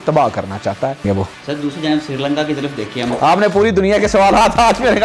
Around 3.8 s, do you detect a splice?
no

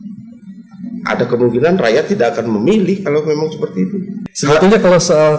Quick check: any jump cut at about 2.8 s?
no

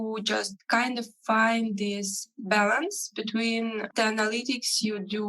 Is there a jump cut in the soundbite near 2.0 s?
no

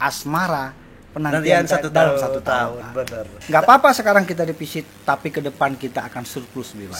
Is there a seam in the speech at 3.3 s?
yes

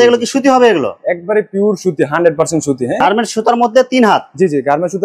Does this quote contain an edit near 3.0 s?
yes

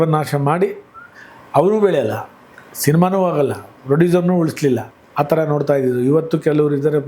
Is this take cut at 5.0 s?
yes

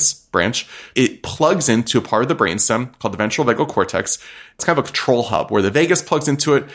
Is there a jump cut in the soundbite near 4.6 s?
yes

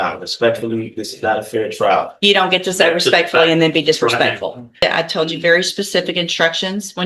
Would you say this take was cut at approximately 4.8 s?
yes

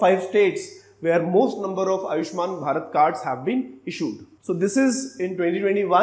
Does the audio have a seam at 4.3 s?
yes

